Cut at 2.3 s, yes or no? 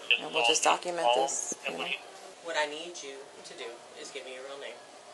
yes